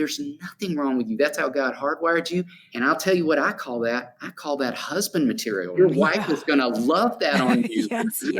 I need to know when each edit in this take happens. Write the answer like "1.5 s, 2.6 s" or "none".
2.6 s, 5.7 s